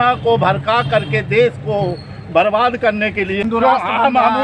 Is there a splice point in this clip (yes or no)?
yes